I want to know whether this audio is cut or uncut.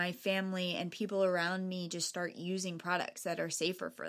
uncut